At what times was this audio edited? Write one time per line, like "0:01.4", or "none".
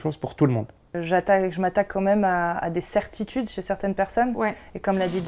0:01.0